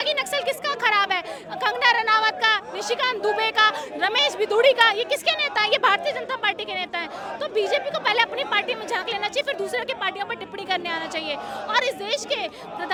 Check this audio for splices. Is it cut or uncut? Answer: uncut